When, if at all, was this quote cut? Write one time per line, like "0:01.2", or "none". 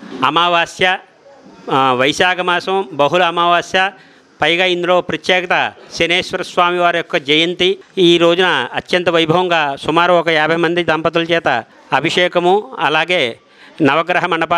0:07.9
0:11.7